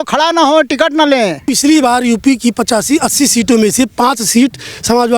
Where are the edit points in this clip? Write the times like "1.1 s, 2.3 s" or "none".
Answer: 1.4 s